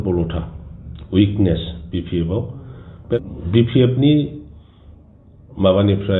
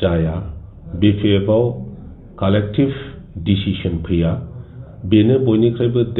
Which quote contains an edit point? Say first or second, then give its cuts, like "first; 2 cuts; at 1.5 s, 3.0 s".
first; 1 cut; at 3.2 s